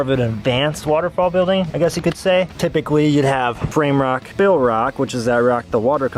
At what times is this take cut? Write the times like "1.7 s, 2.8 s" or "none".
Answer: none